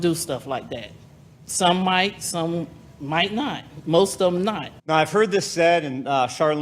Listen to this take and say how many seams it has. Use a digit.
1